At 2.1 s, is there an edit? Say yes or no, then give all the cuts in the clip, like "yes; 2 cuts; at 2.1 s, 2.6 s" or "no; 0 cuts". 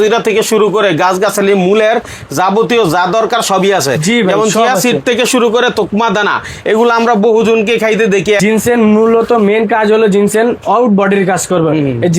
no; 1 cut; at 8.4 s